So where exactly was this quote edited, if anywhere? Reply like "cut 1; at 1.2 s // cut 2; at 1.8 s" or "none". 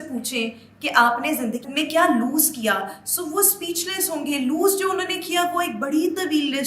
cut 1; at 1.6 s